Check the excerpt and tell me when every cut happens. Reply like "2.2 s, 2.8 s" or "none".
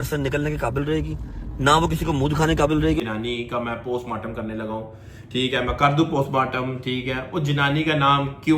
3.0 s